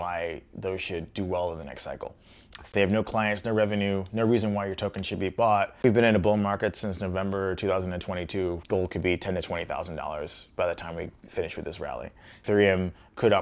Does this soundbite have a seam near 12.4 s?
yes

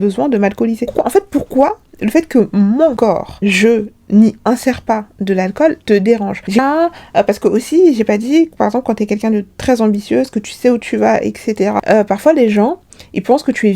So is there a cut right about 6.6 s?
yes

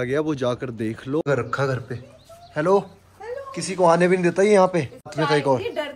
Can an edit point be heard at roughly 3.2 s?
no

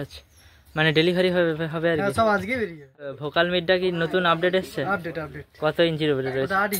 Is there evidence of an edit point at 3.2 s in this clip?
yes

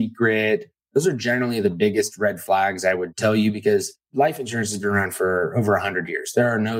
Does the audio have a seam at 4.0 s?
yes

